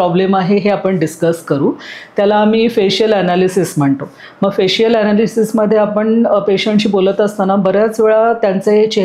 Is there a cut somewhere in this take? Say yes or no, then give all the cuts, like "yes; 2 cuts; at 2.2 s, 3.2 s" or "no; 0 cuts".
no; 0 cuts